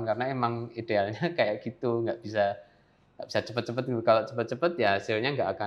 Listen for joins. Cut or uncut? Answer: uncut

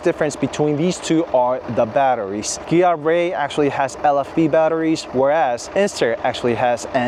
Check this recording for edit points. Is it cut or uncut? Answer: uncut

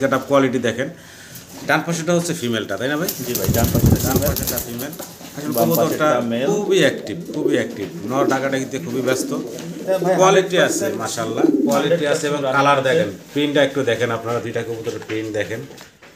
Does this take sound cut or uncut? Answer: uncut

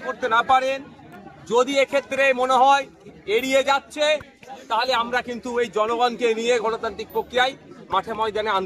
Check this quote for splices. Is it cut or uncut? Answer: uncut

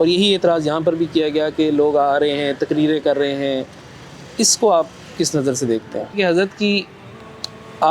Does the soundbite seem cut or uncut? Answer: cut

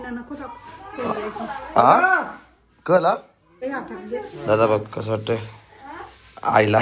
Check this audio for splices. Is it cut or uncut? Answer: cut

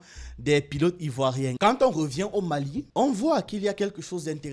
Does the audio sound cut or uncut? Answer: cut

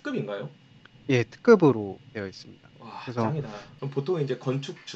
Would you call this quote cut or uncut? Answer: cut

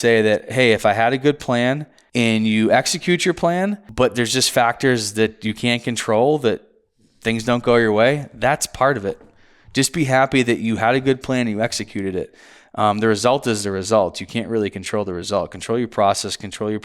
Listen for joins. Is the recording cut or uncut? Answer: cut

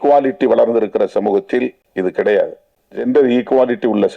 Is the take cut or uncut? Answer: cut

